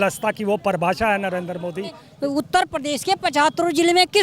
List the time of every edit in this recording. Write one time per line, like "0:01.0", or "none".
0:02.1